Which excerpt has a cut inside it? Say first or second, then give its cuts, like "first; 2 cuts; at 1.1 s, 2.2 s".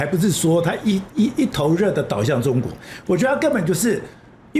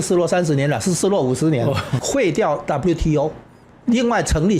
second; 1 cut; at 1.9 s